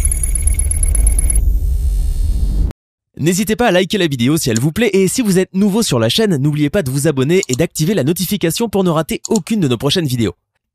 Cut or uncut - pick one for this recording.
cut